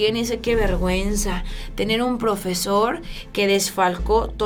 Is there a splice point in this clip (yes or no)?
no